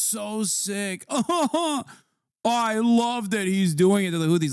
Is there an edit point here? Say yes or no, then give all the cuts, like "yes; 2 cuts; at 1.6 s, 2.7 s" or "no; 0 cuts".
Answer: no; 0 cuts